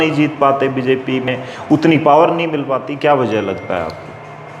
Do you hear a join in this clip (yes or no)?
no